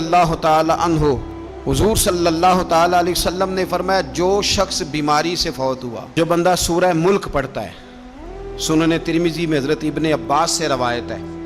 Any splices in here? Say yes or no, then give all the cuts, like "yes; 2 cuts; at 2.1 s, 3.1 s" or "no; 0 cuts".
yes; 1 cut; at 6.1 s